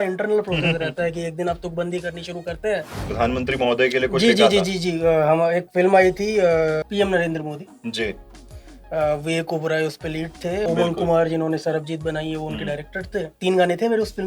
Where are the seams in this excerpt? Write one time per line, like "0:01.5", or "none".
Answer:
0:03.0
0:06.9
0:10.7
0:13.4

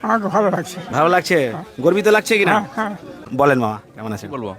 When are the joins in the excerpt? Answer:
0:03.4

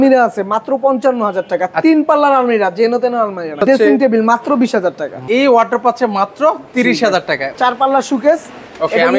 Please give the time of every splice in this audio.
0:03.6
0:05.1
0:07.5

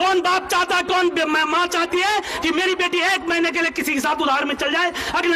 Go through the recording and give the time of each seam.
none

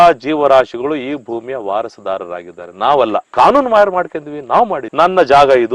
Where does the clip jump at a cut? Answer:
none

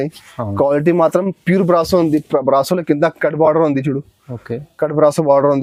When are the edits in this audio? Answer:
none

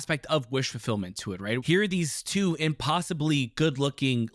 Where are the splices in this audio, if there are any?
0:01.6

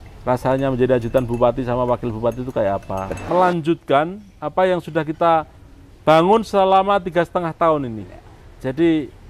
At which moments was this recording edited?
0:03.2

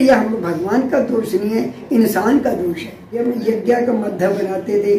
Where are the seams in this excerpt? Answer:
0:03.2

